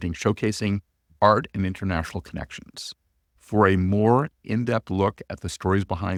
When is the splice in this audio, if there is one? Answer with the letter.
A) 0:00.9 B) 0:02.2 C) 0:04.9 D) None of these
D